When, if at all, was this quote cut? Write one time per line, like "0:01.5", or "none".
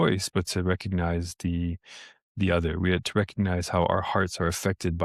none